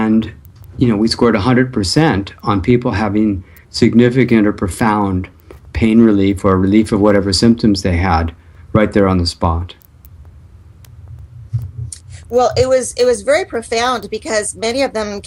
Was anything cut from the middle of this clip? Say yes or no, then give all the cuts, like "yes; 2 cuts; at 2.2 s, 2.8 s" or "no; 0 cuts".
no; 0 cuts